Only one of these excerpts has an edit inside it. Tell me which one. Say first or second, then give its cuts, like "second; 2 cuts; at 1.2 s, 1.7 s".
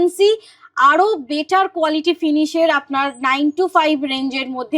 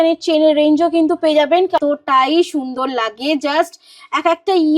second; 1 cut; at 1.8 s